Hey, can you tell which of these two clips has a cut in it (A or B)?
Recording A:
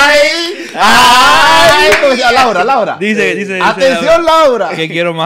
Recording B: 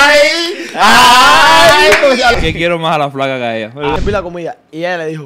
B